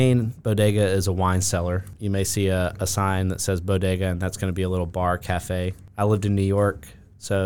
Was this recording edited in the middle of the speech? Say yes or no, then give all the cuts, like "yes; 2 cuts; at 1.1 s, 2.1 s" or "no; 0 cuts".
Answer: yes; 2 cuts; at 1.9 s, 5.8 s